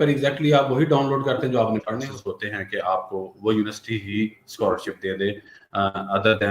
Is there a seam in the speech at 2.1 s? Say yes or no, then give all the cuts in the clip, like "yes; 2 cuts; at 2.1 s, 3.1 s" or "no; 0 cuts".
yes; 1 cut; at 2.1 s